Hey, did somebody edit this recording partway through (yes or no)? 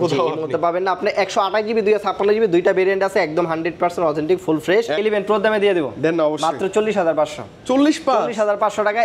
yes